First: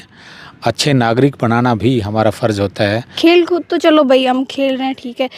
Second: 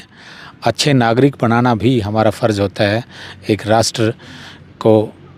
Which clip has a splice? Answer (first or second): first